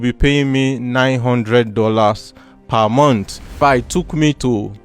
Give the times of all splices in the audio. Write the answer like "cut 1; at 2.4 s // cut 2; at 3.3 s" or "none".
cut 1; at 3.6 s